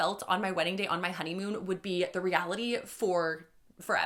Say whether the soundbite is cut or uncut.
uncut